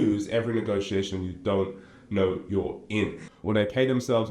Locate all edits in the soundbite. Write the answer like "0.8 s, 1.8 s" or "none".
3.2 s